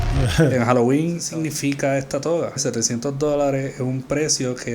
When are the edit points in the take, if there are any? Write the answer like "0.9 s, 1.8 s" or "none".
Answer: 1.2 s, 2.6 s